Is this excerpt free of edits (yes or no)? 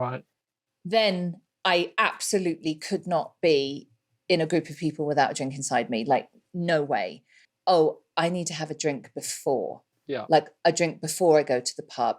no